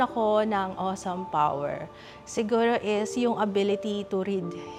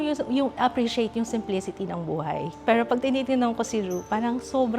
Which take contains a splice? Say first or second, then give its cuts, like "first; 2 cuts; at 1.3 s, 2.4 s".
second; 1 cut; at 2.5 s